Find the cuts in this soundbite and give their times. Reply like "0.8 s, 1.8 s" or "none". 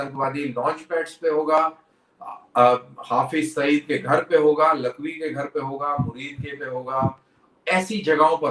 none